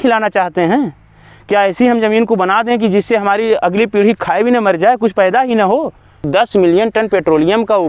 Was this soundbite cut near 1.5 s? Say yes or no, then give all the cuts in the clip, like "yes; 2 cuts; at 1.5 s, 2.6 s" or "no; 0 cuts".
no; 1 cut; at 6.2 s